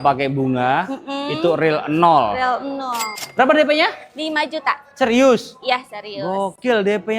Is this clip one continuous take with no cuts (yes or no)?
no